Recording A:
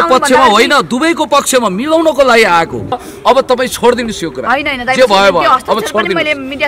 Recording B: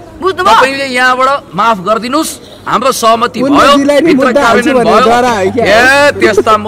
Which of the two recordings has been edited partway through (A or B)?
A